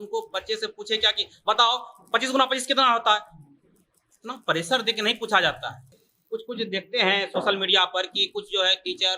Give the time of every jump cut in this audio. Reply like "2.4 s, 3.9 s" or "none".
6.1 s